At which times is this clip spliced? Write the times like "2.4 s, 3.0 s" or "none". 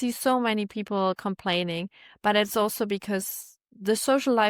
3.6 s